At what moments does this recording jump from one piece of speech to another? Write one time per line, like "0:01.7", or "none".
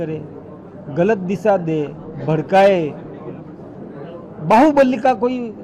none